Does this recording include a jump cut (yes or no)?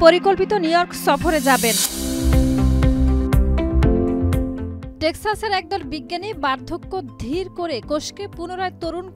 yes